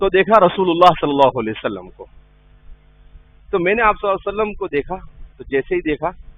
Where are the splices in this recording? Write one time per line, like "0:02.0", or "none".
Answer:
none